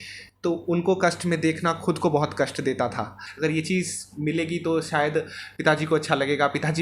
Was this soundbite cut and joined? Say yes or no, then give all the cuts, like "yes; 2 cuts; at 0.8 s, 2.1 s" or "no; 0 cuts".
yes; 1 cut; at 3.2 s